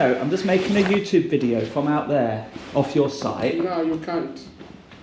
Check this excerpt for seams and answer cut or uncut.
uncut